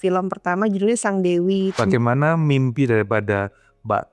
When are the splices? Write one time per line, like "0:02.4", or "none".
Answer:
0:01.7